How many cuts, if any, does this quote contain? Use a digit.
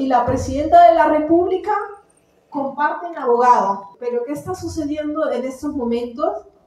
1